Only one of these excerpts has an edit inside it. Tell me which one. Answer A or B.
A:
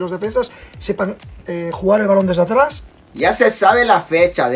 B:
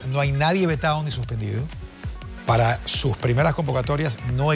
A